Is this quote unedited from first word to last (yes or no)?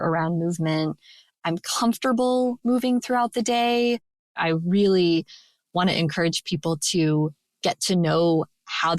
no